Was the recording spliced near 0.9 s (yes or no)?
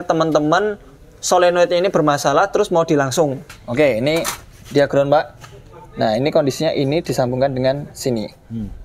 no